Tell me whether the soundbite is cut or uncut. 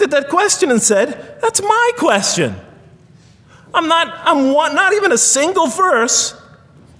uncut